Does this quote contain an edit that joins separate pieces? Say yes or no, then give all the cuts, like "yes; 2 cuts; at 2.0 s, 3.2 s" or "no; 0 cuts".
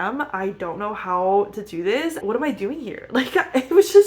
yes; 1 cut; at 2.2 s